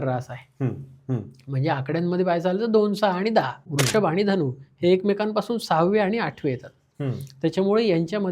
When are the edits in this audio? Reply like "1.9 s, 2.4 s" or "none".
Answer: 3.6 s